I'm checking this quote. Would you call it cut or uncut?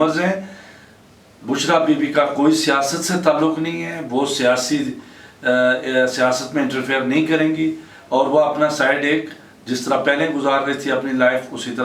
uncut